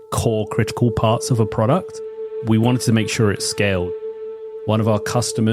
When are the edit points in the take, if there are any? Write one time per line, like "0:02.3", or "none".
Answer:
0:04.1